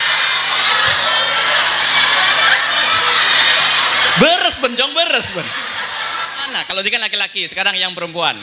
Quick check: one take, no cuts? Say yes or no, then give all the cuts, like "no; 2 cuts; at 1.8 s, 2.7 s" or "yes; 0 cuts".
no; 1 cut; at 6.5 s